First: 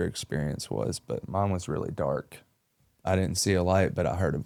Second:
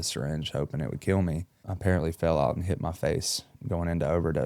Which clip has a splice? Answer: second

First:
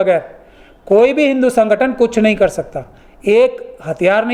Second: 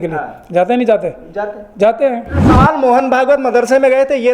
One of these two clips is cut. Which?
second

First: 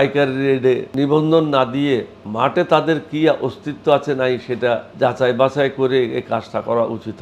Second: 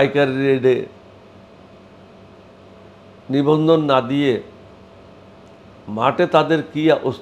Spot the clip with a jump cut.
first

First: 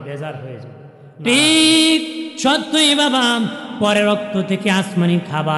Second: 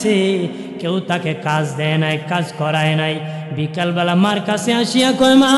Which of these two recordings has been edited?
first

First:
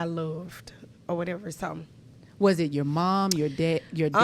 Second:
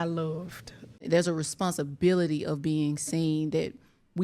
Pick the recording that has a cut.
second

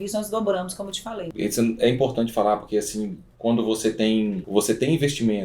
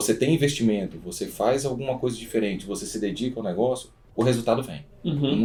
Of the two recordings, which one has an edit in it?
first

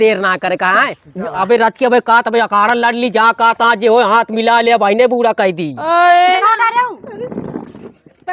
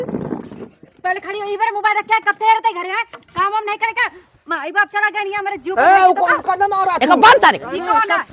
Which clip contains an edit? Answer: first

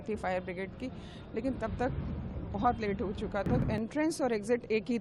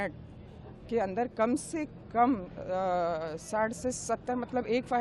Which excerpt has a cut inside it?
first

